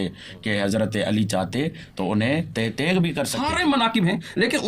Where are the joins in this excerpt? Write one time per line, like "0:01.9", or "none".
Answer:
0:03.3

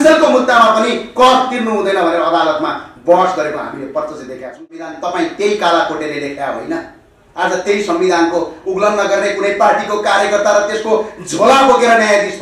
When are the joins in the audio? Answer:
0:04.9

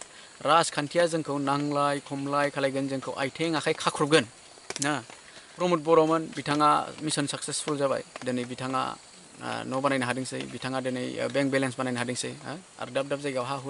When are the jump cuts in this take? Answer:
0:05.5

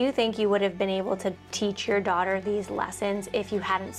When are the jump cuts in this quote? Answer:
none

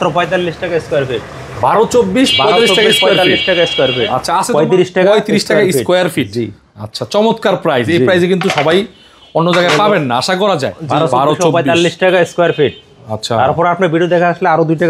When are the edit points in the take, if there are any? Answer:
0:04.5
0:10.8

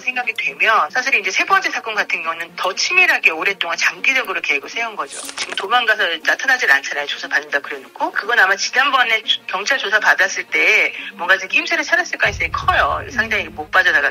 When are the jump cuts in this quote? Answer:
0:05.4

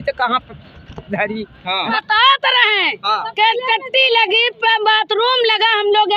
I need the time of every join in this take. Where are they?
0:01.9

